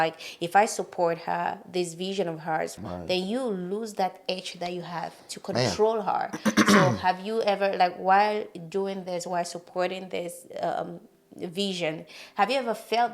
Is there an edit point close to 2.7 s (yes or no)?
yes